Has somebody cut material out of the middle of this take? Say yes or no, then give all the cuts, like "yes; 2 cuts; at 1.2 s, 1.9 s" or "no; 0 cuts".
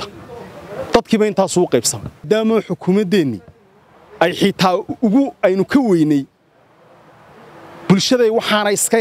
yes; 1 cut; at 2.2 s